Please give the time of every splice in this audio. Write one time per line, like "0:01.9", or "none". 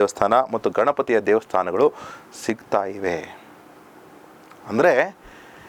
none